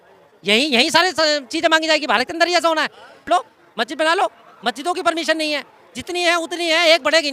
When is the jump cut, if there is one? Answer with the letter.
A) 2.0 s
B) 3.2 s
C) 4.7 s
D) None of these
B